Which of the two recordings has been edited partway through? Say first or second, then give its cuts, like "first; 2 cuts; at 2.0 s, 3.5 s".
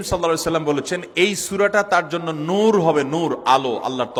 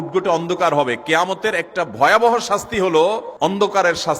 second; 1 cut; at 3.3 s